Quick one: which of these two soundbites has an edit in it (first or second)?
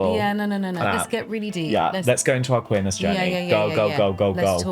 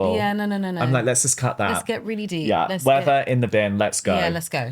first